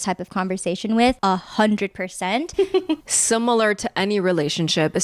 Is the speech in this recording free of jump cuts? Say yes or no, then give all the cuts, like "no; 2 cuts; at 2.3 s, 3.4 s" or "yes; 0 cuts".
no; 2 cuts; at 1.2 s, 3.0 s